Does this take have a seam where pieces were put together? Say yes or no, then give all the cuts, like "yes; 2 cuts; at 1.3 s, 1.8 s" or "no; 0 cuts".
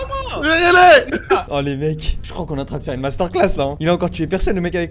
no; 0 cuts